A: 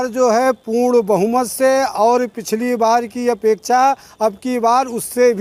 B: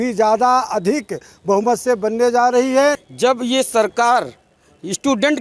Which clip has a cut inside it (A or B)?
B